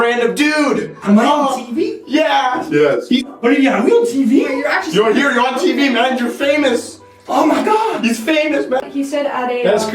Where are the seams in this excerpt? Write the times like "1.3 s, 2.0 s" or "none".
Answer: 8.8 s